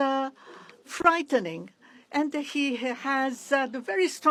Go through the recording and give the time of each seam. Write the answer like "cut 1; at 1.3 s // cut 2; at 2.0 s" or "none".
none